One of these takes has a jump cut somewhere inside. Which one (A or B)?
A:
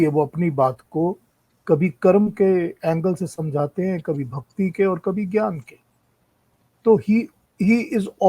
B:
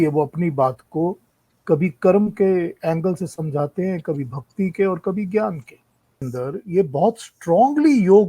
B